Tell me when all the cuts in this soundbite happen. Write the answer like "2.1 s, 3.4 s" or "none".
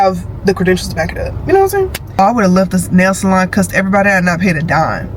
2.0 s